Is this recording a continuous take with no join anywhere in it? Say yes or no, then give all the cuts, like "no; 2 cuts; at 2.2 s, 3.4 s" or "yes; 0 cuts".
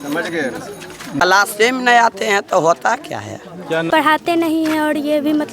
no; 2 cuts; at 1.3 s, 4.2 s